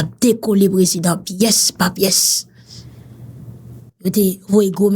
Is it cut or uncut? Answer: uncut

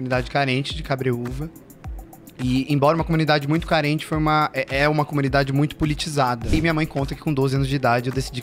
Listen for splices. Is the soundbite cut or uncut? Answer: cut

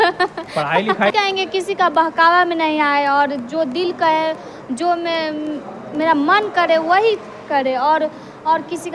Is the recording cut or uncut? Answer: cut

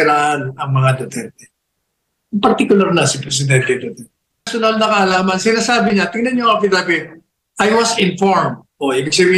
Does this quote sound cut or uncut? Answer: cut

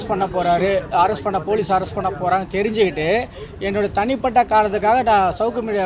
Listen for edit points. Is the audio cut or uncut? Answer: uncut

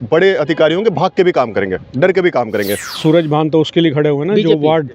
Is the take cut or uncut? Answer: cut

